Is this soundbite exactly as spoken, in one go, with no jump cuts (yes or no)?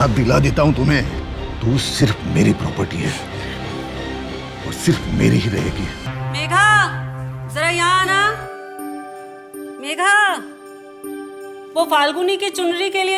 no